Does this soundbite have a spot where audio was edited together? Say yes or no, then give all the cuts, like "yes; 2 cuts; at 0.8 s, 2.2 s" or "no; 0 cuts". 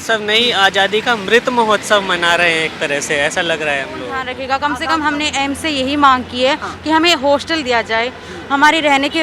yes; 1 cut; at 4.3 s